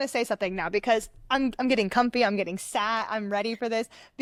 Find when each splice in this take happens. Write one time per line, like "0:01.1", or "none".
none

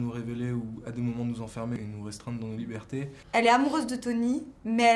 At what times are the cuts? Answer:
0:01.8
0:03.2

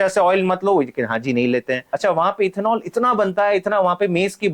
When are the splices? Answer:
0:01.9

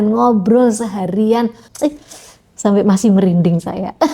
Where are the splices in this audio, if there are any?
0:01.6

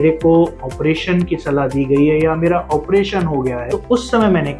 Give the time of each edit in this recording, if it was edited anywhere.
0:03.7

